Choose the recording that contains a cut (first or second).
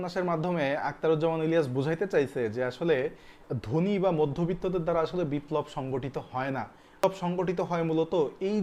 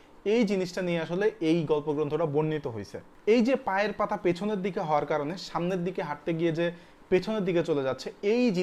second